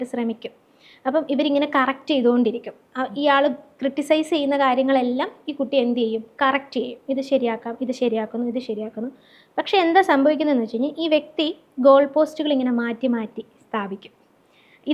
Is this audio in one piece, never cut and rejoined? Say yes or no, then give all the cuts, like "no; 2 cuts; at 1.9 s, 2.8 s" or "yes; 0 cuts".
yes; 0 cuts